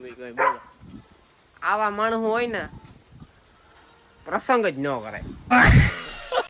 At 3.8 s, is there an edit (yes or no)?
no